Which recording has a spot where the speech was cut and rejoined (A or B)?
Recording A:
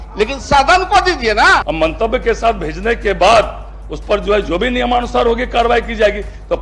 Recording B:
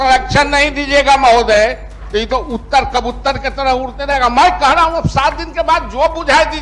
A